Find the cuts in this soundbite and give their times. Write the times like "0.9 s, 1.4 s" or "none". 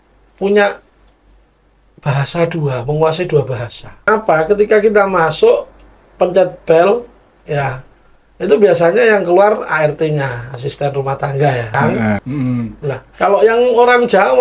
4.1 s, 12.2 s